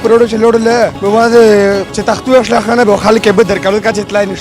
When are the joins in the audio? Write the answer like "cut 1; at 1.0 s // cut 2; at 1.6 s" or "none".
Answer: cut 1; at 1.0 s // cut 2; at 1.9 s